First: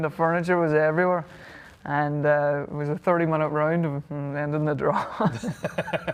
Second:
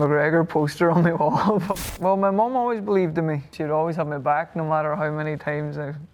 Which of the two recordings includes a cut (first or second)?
second